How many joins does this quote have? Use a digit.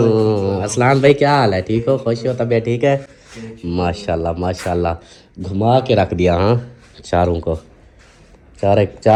0